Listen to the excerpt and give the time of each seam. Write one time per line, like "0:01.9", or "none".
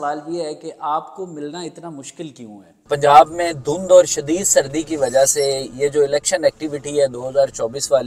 0:02.9